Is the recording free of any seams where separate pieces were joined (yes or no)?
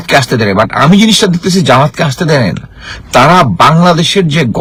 yes